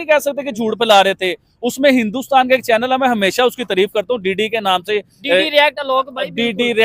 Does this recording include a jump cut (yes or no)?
no